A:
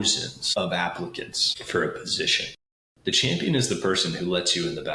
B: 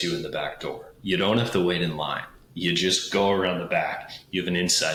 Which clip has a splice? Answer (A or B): A